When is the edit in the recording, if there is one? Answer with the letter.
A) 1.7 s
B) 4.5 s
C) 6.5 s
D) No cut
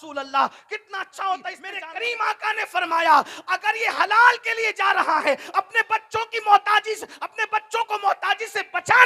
A